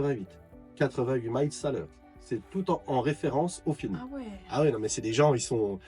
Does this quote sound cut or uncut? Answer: uncut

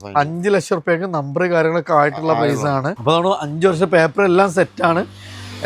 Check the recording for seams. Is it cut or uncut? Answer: uncut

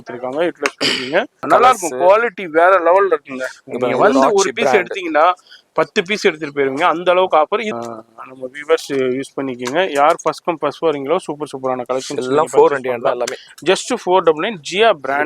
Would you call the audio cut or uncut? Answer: cut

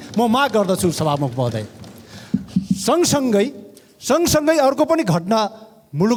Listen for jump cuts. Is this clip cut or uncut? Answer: uncut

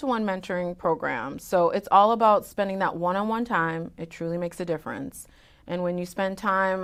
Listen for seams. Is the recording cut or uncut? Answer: uncut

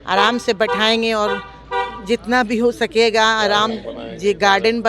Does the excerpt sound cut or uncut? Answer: uncut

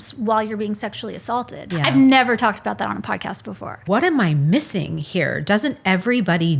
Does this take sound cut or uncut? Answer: cut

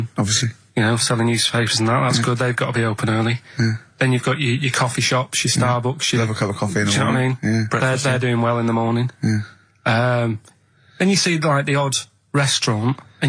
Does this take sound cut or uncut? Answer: uncut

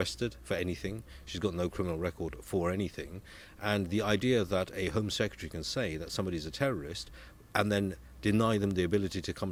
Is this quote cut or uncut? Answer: uncut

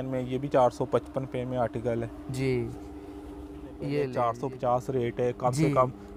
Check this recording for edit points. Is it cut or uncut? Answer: cut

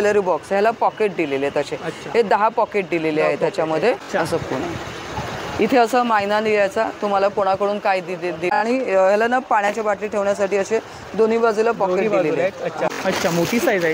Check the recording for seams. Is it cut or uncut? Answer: cut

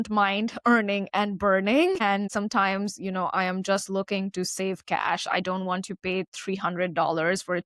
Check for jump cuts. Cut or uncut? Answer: uncut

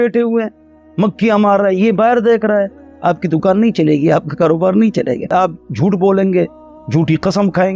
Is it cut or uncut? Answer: cut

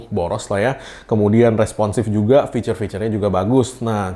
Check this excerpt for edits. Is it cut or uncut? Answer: uncut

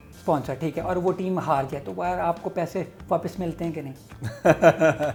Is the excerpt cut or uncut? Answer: uncut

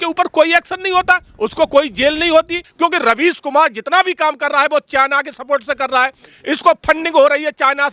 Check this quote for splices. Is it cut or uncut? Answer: cut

